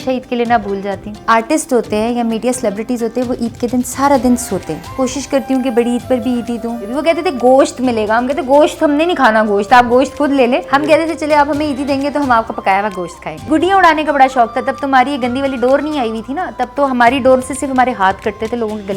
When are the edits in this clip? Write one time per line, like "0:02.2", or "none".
0:01.2
0:04.9
0:06.9
0:10.6
0:13.5